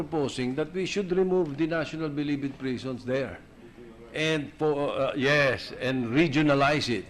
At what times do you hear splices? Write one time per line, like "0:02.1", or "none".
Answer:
0:00.9